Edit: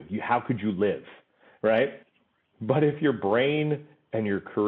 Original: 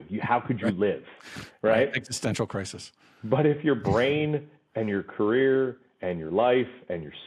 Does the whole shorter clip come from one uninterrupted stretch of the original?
no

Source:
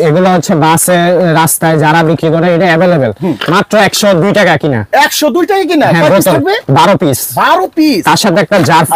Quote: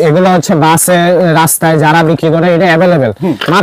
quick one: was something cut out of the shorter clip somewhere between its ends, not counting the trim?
no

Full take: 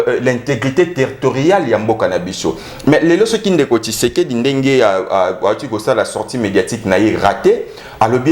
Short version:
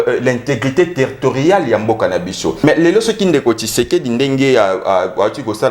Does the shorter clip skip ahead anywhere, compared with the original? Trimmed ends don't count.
yes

